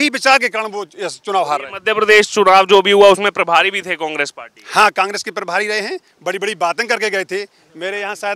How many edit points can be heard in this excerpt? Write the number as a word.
zero